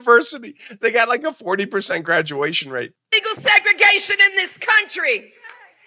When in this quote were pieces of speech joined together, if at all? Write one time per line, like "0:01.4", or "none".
0:02.9